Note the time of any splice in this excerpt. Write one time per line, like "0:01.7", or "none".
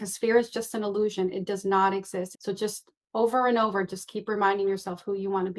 0:02.3